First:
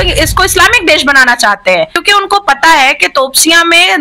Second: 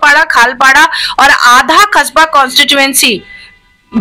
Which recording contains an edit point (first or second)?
first